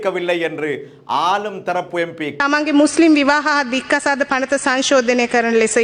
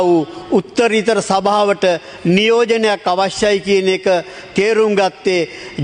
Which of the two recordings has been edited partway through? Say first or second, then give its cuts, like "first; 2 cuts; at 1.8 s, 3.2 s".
first; 1 cut; at 2.4 s